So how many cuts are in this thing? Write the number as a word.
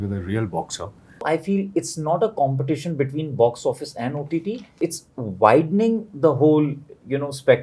two